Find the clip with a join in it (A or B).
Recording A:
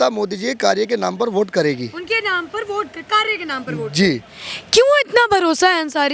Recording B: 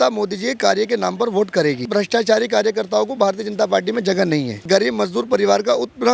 B